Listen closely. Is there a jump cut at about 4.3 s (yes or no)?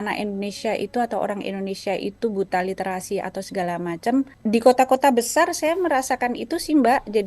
yes